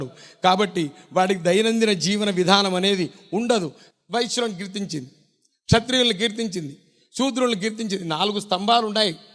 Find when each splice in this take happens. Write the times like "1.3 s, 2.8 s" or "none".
3.8 s